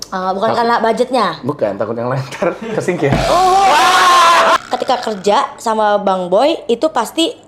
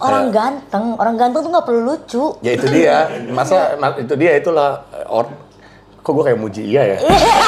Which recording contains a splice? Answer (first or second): first